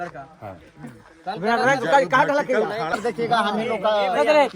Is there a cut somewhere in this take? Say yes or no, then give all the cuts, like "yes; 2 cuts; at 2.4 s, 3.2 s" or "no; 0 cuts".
yes; 1 cut; at 3.0 s